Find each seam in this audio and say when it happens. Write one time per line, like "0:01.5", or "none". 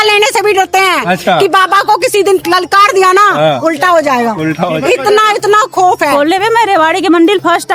0:06.1